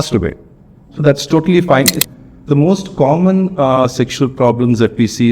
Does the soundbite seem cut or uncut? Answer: cut